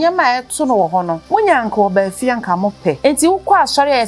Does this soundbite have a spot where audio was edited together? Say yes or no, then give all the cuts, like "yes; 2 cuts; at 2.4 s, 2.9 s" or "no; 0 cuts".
yes; 2 cuts; at 1.2 s, 3.0 s